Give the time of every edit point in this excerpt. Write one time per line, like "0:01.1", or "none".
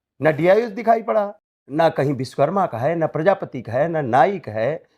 0:01.6